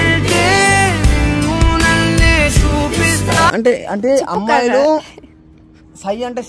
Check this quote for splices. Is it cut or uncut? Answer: uncut